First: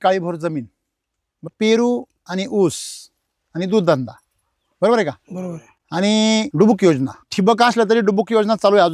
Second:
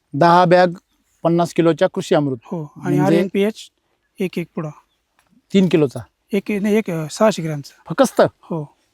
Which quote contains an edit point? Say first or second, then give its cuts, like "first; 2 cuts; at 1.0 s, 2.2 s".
first; 3 cuts; at 1.5 s, 6.5 s, 7.2 s